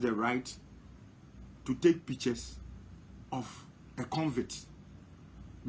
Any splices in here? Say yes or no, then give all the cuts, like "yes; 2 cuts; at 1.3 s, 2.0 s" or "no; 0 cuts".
no; 0 cuts